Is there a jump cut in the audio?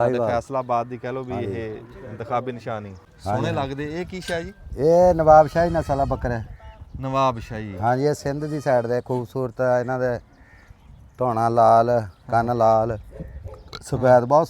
yes; 1 cut; at 3.0 s

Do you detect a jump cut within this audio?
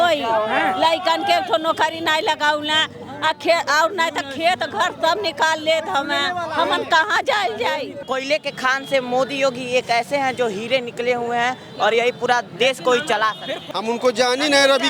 yes; 2 cuts; at 7.9 s, 13.6 s

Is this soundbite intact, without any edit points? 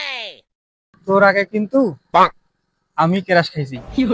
yes; 0 cuts

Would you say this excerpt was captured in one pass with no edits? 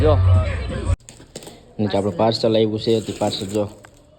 no; 1 cut; at 0.9 s

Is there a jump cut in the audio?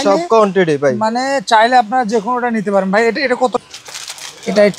yes; 1 cut; at 3.6 s

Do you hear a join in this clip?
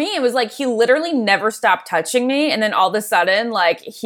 no; 0 cuts

